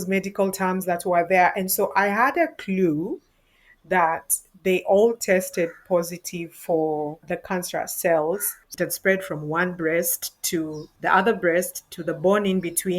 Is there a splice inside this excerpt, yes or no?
yes